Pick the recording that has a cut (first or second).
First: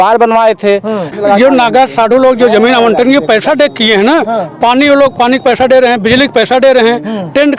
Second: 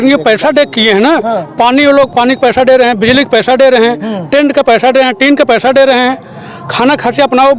first